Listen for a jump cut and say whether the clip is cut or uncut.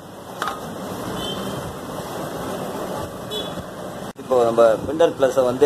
cut